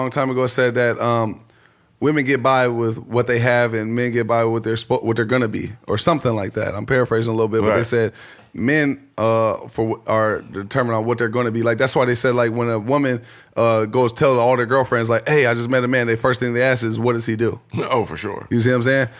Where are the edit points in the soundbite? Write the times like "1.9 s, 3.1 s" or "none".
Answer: none